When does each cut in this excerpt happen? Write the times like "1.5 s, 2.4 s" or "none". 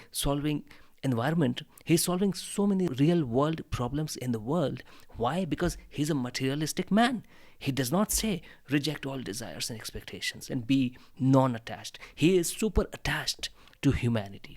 2.9 s